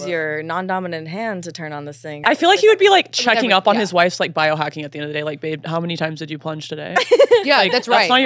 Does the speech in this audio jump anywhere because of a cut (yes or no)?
yes